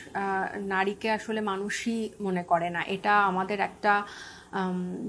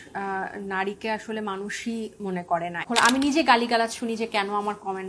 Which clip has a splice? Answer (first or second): second